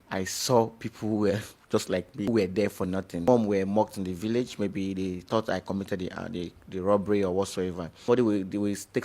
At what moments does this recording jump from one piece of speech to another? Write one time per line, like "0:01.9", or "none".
0:02.3
0:03.2
0:08.1